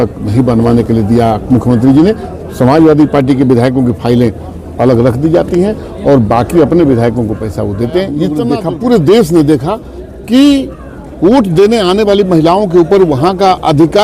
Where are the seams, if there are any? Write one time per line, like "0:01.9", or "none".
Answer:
0:08.4